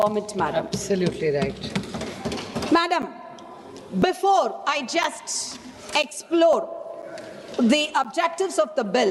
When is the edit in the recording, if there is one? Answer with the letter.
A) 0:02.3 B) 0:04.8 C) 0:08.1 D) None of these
D